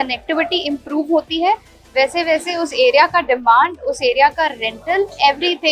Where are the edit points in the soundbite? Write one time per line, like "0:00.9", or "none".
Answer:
none